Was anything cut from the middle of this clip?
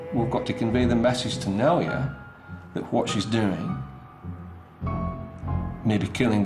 no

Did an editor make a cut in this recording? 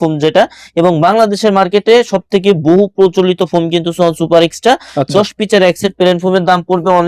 no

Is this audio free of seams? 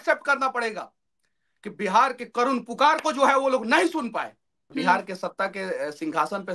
no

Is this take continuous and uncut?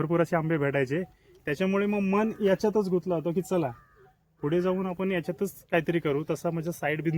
yes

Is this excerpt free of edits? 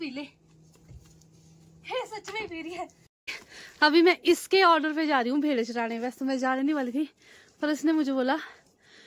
yes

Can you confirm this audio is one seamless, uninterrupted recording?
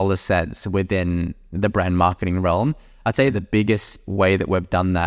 no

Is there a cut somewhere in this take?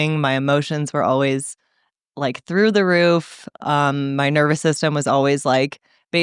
no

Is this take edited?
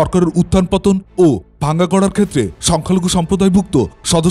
yes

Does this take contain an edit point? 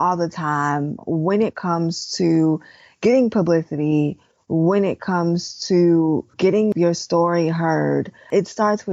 yes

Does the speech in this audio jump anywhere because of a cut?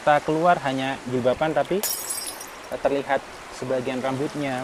no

